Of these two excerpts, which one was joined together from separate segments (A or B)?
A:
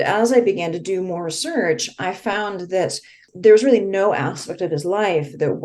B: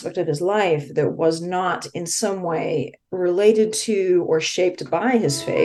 A